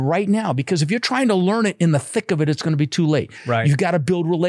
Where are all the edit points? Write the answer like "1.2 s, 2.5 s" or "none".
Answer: none